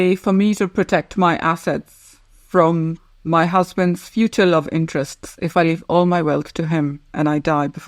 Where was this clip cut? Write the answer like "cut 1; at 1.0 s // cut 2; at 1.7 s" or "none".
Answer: none